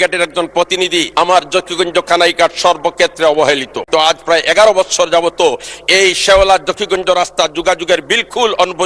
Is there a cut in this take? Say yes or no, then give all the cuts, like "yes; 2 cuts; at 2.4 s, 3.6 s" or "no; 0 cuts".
yes; 2 cuts; at 1.1 s, 3.8 s